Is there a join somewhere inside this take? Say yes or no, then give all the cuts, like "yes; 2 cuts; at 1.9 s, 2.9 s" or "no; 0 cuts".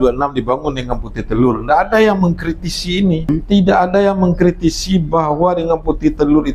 yes; 1 cut; at 3.3 s